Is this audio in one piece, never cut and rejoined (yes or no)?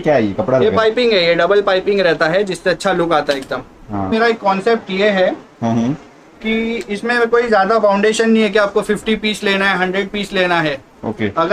no